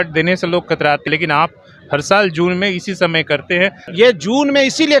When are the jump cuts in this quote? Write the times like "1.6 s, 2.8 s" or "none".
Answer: 1.1 s, 3.8 s